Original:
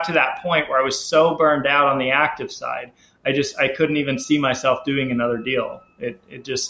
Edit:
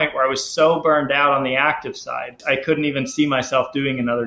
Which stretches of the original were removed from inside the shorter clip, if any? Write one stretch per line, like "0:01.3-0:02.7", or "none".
0:03.0-0:03.5